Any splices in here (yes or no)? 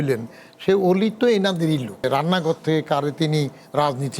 yes